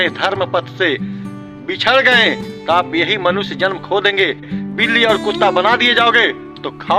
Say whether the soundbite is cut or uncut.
cut